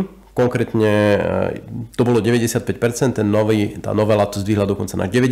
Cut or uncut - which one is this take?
uncut